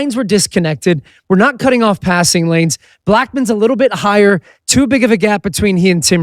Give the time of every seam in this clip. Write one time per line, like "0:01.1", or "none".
none